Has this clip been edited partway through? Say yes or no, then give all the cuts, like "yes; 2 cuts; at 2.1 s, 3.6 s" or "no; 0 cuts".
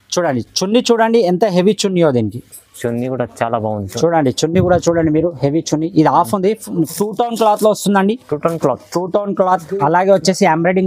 yes; 1 cut; at 6.9 s